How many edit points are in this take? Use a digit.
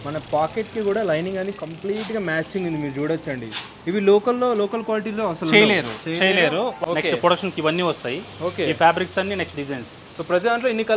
1